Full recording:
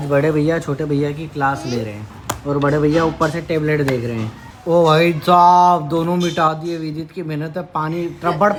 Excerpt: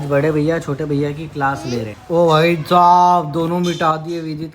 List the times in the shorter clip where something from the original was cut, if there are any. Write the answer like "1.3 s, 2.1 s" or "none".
1.9 s